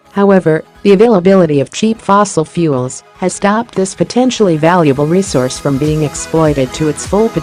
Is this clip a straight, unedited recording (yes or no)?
yes